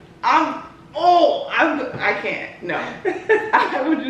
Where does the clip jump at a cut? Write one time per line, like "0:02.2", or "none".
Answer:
none